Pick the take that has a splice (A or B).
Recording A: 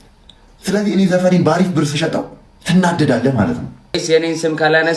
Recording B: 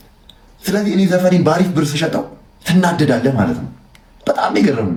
A